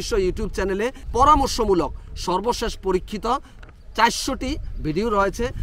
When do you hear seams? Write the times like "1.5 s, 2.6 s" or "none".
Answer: 1.1 s